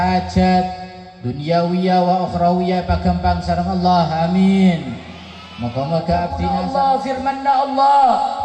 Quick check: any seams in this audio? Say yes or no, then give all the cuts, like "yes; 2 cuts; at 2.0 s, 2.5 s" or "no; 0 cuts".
yes; 1 cut; at 6.4 s